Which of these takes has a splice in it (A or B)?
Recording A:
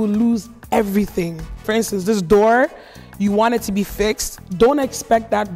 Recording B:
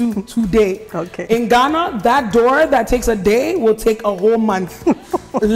A